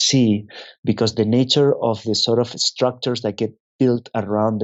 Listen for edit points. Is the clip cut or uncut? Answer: uncut